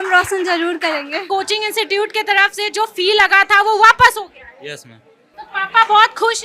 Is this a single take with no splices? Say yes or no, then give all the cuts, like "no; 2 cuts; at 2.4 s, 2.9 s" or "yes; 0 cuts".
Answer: no; 1 cut; at 1.2 s